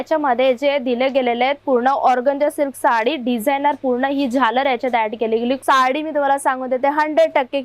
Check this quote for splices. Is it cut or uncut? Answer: cut